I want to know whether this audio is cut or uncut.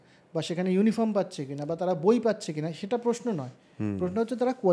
uncut